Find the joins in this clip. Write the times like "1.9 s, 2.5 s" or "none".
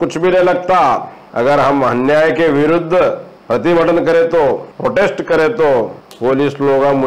1.2 s, 3.3 s, 4.7 s, 6.0 s